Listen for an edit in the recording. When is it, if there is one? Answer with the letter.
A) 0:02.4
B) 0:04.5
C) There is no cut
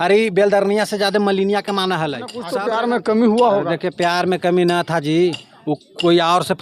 A